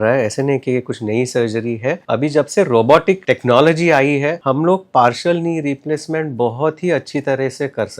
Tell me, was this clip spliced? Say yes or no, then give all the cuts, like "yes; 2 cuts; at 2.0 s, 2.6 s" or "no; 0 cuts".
yes; 3 cuts; at 2.0 s, 3.2 s, 4.4 s